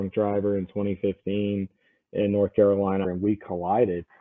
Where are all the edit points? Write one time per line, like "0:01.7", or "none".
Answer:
0:03.1